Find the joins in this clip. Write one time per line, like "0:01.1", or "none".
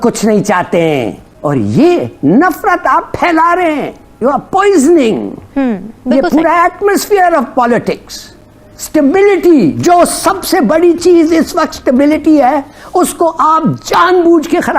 0:01.2
0:04.0